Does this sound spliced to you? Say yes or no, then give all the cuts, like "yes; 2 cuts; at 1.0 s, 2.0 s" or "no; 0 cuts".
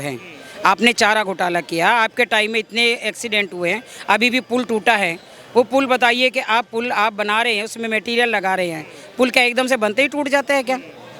no; 0 cuts